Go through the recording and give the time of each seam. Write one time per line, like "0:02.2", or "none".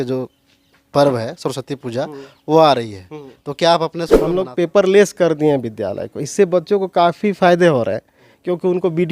0:04.3